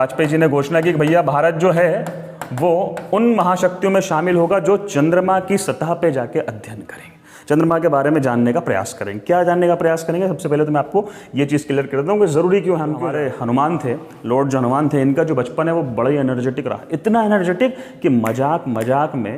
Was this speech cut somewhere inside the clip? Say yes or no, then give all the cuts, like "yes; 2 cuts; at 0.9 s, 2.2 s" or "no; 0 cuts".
yes; 1 cut; at 13.0 s